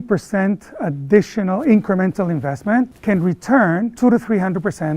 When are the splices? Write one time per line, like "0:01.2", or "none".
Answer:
0:03.9